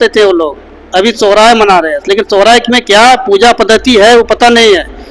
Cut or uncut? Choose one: uncut